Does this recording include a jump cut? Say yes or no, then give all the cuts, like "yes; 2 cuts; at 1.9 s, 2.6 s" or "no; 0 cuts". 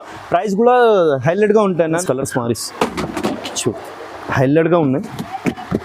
yes; 1 cut; at 2.0 s